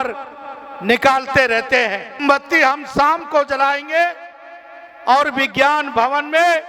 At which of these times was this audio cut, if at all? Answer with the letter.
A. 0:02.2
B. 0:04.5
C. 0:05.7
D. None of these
A